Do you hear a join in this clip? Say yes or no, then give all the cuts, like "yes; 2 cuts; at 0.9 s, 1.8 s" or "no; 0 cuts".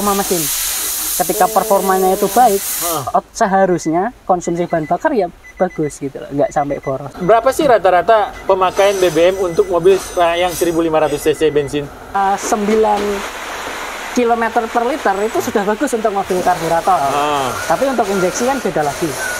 yes; 2 cuts; at 7.1 s, 12.2 s